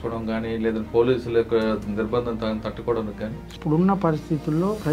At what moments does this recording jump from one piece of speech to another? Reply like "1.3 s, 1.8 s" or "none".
3.6 s